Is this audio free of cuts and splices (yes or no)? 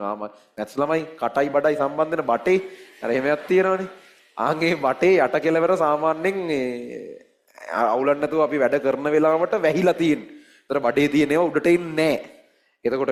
yes